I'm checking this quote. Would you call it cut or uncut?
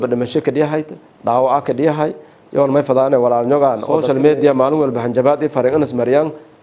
cut